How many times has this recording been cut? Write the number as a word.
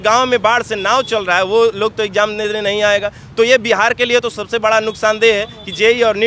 zero